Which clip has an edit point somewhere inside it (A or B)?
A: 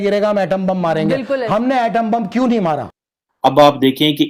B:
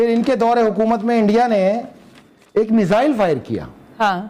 A